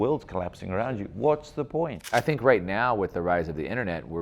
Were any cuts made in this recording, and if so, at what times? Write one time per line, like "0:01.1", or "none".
0:02.1